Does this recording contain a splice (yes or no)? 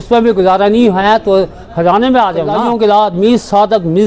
yes